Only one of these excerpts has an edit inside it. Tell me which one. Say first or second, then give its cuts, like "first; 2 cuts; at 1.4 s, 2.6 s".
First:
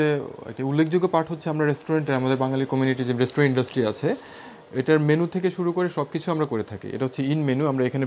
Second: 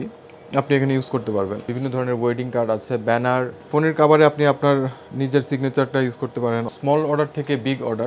second; 3 cuts; at 1.7 s, 3.0 s, 6.7 s